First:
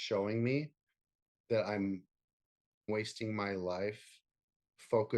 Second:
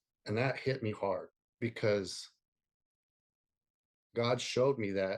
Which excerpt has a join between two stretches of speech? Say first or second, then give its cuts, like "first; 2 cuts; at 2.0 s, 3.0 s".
first; 1 cut; at 2.9 s